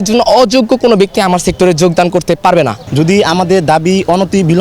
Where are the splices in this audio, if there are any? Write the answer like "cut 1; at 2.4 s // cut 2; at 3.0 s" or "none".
cut 1; at 2.8 s